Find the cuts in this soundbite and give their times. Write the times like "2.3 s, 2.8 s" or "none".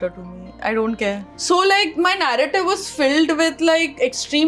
1.3 s

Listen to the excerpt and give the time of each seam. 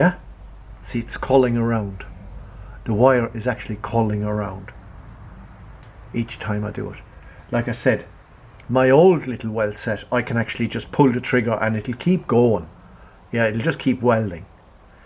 none

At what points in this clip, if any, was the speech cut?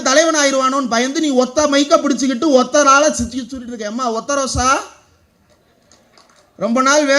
none

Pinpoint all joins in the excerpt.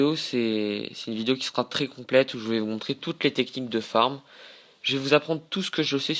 none

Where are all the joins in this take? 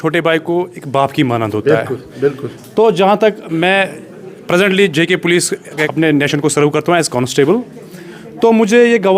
5.9 s

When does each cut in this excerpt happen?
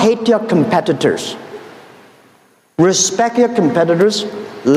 none

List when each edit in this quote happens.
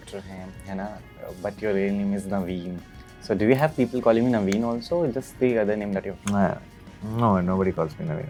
none

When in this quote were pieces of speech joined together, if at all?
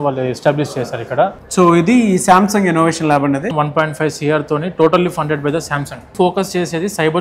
1.4 s, 3.5 s, 6.1 s

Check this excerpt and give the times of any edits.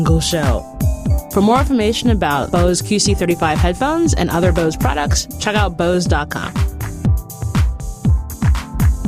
7.0 s

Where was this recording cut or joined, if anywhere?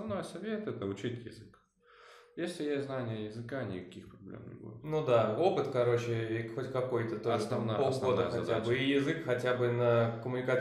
none

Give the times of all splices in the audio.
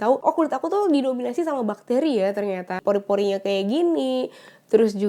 2.8 s

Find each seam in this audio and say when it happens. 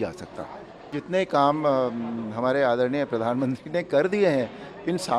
1.0 s

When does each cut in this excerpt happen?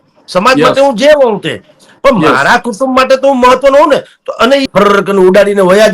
4.7 s

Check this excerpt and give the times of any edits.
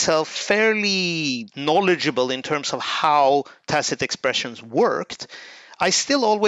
1.5 s

